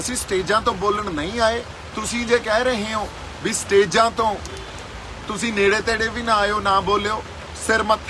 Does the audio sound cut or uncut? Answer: uncut